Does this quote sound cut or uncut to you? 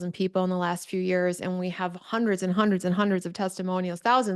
uncut